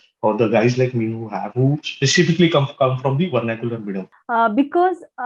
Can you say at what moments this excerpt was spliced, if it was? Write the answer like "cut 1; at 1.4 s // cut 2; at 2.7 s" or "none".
cut 1; at 4.0 s